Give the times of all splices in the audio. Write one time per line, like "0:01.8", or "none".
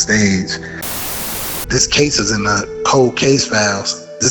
0:01.2

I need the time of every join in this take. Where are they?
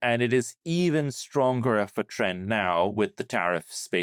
none

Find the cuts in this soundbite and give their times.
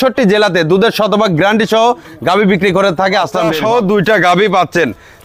0:03.5

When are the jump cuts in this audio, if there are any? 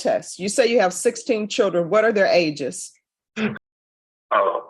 0:03.6

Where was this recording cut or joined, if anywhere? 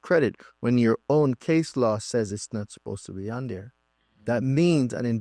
none

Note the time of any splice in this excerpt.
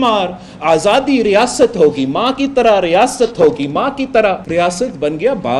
0:04.4

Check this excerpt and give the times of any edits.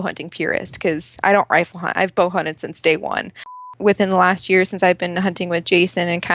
0:03.6

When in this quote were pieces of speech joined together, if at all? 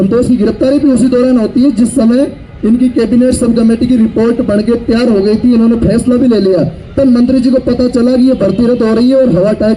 none

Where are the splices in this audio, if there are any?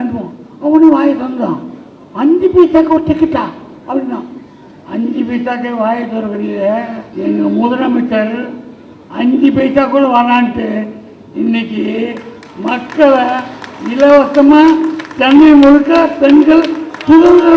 0:07.0

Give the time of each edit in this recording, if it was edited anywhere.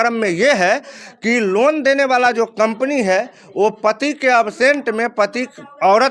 none

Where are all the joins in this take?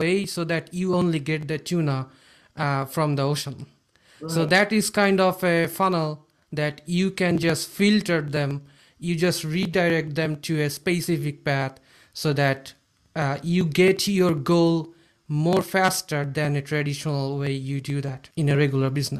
0:18.2

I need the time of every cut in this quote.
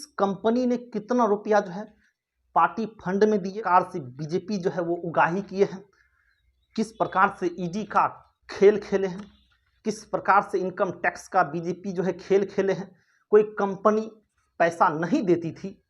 0:03.6

